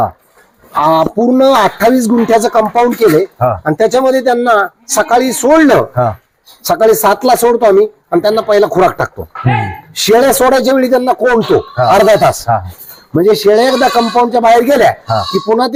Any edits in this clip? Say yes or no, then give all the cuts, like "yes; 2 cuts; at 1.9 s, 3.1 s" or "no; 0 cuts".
no; 0 cuts